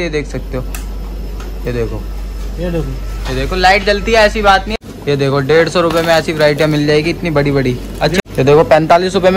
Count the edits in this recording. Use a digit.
2